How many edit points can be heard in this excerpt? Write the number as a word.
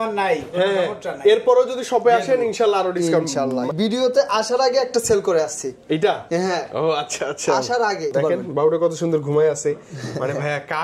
two